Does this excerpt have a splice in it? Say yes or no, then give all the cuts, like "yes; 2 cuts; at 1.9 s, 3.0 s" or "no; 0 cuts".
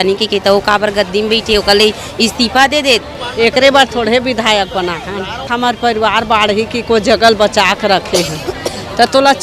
yes; 2 cuts; at 3.2 s, 5.5 s